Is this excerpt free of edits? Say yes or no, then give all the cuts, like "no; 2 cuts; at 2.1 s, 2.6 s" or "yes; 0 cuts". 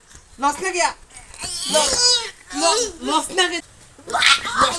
no; 1 cut; at 3.7 s